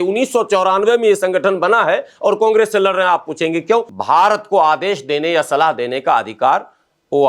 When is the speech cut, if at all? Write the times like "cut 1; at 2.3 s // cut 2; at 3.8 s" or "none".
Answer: cut 1; at 3.9 s

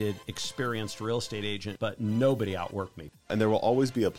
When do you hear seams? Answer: cut 1; at 1.7 s // cut 2; at 3.3 s

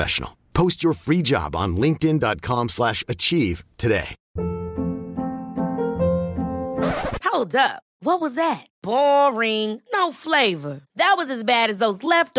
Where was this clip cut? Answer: cut 1; at 4.2 s

